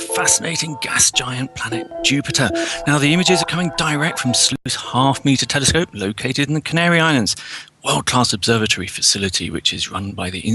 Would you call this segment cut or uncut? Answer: cut